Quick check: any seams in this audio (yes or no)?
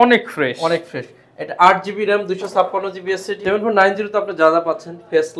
yes